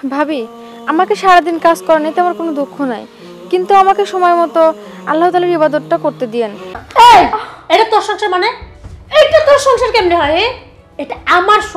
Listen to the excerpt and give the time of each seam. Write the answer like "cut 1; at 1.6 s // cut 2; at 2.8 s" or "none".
cut 1; at 6.7 s